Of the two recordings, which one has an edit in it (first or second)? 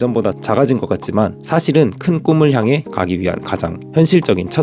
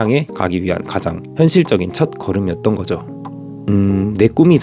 second